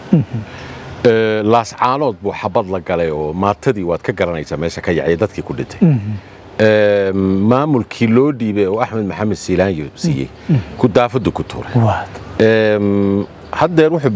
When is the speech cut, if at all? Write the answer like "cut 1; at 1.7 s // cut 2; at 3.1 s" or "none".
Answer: none